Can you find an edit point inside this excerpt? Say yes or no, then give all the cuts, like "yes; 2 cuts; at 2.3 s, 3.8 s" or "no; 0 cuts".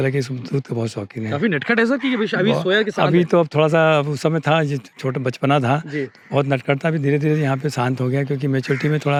no; 0 cuts